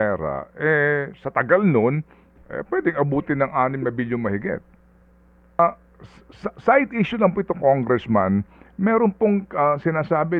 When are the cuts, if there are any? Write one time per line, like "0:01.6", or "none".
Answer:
0:05.6